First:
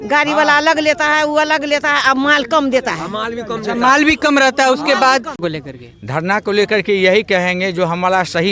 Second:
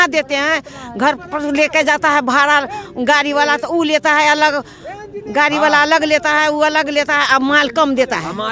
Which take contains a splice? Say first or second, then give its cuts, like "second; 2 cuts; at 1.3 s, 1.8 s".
first; 1 cut; at 5.4 s